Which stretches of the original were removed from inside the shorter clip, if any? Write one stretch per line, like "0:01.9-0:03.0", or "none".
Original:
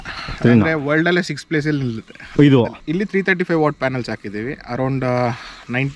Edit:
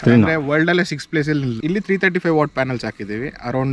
0:01.9-0:02.8